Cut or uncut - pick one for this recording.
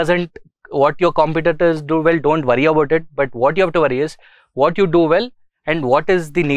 uncut